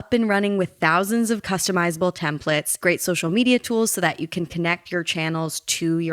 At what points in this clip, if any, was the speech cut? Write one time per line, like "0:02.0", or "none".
0:02.8